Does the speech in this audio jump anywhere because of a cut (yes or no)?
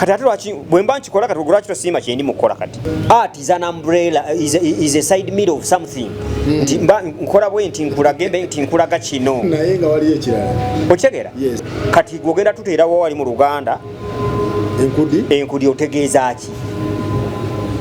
yes